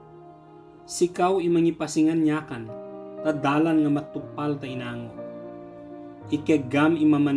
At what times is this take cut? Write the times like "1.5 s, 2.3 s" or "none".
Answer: 1.0 s, 5.0 s, 6.3 s